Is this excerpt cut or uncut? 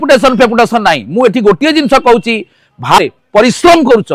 cut